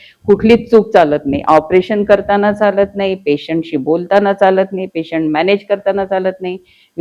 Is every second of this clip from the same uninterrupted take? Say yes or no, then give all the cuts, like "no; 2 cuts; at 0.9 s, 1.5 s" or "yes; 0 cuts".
yes; 0 cuts